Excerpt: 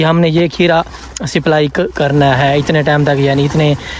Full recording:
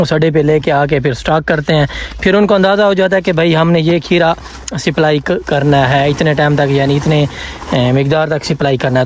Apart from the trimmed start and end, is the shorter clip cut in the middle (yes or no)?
no